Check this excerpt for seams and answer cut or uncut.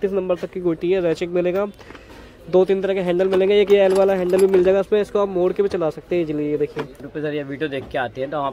cut